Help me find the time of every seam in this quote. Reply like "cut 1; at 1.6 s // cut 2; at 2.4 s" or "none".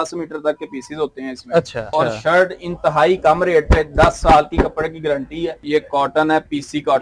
cut 1; at 1.9 s // cut 2; at 5.6 s

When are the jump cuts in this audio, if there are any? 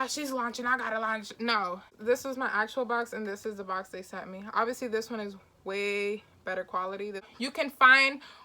cut 1; at 1.9 s // cut 2; at 7.3 s

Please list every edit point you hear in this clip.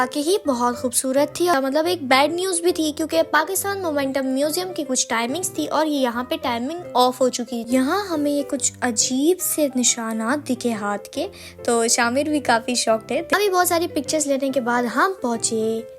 cut 1; at 1.5 s // cut 2; at 7.6 s // cut 3; at 13.3 s

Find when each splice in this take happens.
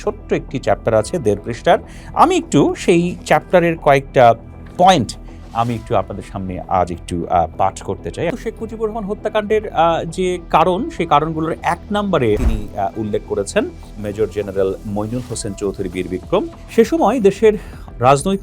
cut 1; at 8.3 s // cut 2; at 12.4 s // cut 3; at 16.6 s

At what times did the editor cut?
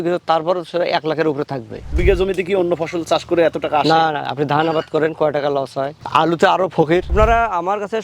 cut 1; at 1.9 s // cut 2; at 6.0 s // cut 3; at 7.1 s

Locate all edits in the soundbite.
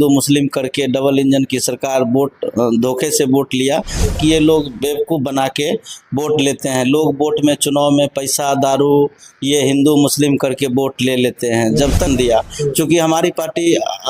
cut 1; at 4.1 s // cut 2; at 12.1 s

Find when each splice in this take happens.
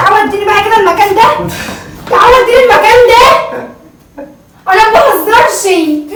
none

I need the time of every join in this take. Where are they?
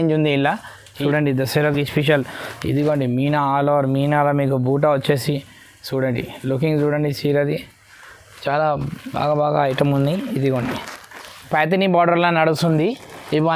cut 1; at 0.9 s // cut 2; at 11.5 s

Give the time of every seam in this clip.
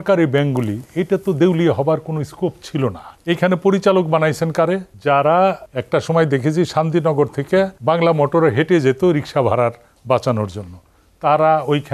cut 1; at 3.1 s // cut 2; at 4.9 s // cut 3; at 5.7 s // cut 4; at 7.7 s

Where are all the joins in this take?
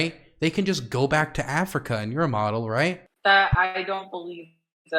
cut 1; at 3.1 s

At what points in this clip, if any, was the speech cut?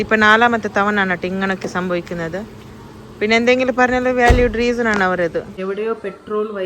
cut 1; at 5.6 s

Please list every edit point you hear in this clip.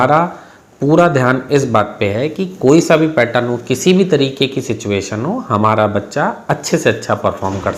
none

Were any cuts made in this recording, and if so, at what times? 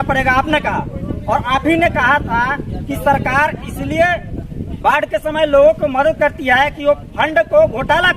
none

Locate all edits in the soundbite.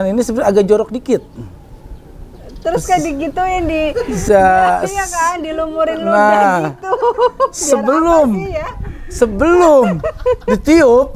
none

